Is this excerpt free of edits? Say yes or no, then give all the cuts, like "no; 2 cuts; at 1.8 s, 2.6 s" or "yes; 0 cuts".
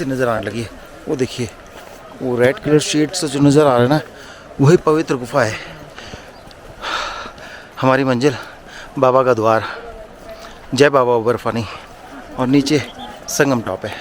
yes; 0 cuts